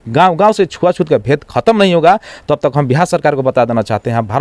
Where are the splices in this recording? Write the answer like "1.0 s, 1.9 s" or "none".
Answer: none